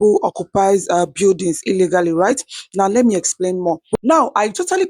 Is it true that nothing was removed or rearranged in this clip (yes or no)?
no